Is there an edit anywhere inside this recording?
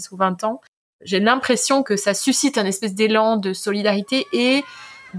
yes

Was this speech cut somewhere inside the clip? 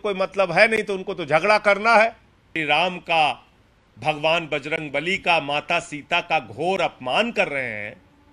yes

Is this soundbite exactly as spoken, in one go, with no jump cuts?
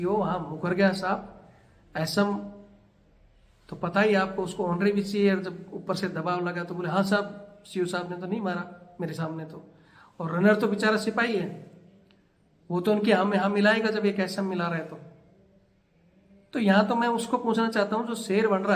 yes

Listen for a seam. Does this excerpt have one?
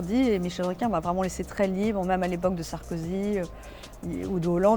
no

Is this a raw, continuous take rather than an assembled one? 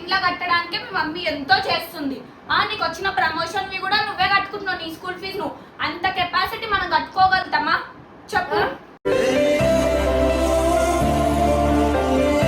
yes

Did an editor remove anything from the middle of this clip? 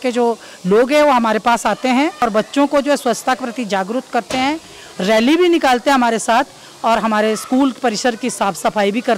yes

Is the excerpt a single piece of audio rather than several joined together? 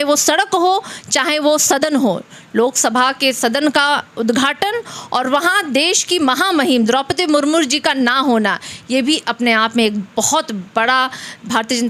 yes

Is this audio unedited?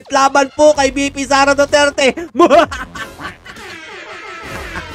yes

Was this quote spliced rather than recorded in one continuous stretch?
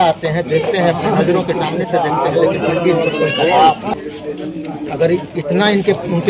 no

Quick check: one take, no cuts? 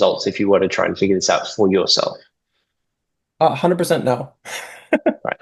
yes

